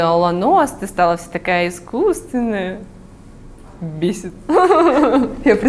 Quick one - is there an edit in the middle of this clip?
no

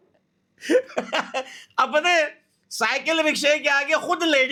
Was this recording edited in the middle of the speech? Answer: no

